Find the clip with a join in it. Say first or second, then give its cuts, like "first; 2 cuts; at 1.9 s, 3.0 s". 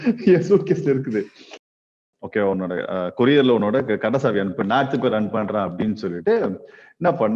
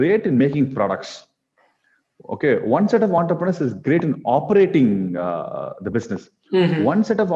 first; 1 cut; at 1.8 s